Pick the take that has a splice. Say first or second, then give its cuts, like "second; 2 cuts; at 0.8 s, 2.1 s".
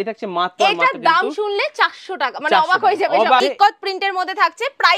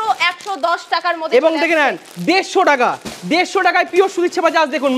first; 1 cut; at 3.4 s